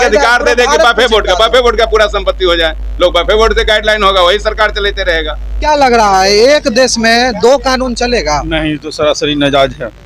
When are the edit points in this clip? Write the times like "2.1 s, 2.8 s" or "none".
5.6 s